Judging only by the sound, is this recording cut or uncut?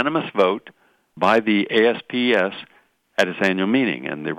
cut